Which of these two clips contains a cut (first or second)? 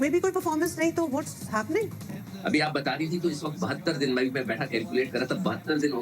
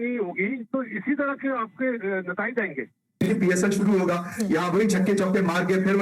second